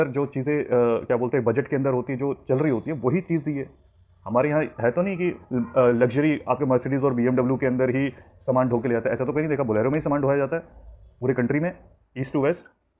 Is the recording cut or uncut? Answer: uncut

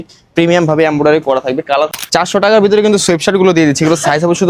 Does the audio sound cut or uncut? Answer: cut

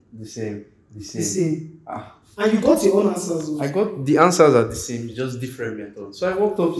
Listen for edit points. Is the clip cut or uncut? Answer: uncut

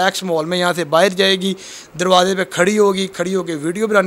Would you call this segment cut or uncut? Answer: uncut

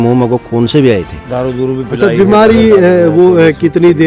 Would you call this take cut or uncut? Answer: uncut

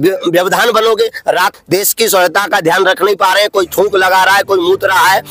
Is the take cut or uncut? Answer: cut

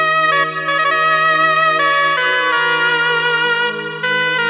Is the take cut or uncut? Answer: uncut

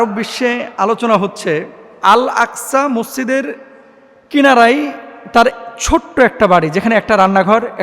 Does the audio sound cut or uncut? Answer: cut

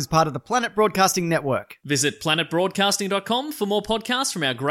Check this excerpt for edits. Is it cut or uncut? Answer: uncut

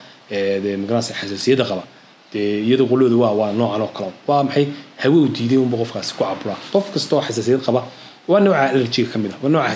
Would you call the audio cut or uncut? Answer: uncut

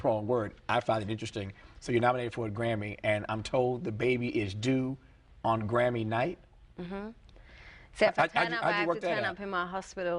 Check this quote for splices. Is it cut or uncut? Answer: cut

